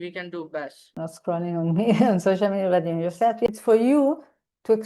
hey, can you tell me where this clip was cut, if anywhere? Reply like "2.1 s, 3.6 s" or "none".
1.0 s, 3.5 s